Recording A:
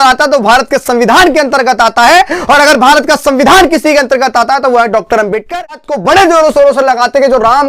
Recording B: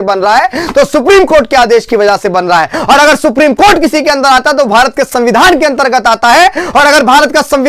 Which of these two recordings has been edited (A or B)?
A